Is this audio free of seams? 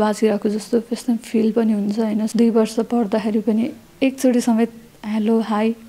no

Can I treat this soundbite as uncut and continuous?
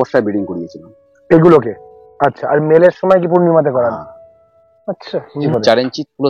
no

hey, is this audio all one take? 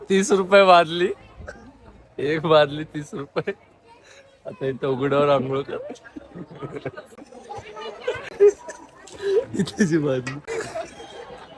yes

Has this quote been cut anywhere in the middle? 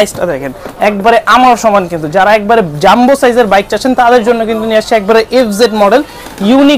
no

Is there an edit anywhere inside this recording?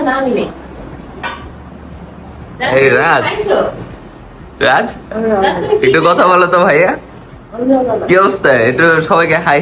no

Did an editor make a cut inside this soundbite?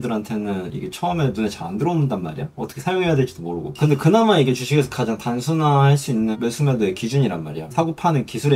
yes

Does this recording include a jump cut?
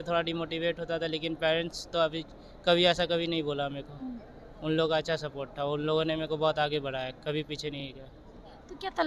no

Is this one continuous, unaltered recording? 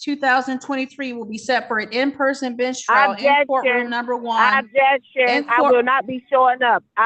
yes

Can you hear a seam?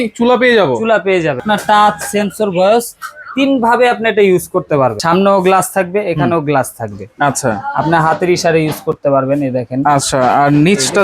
yes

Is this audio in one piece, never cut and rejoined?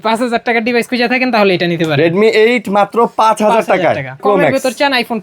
no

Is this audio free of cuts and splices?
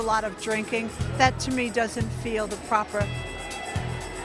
yes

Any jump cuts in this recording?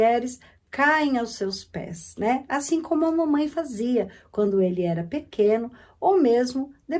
no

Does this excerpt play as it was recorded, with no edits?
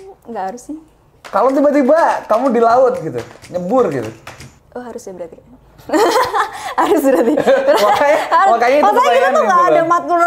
yes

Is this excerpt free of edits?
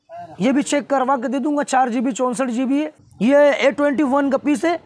no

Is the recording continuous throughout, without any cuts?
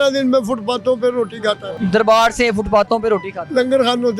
no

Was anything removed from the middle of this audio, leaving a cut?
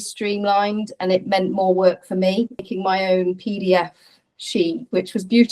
yes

